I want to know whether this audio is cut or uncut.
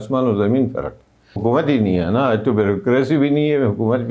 cut